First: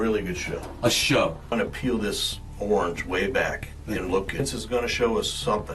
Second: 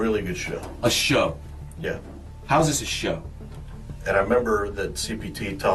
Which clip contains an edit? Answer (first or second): first